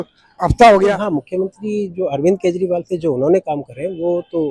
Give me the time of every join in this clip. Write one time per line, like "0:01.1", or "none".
0:01.0